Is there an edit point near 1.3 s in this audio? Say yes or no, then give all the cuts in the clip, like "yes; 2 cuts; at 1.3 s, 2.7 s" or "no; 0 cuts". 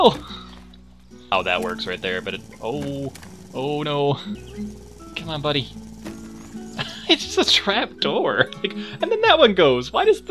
yes; 2 cuts; at 1.3 s, 4.4 s